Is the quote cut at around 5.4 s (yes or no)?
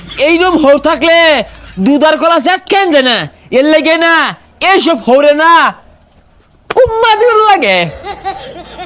no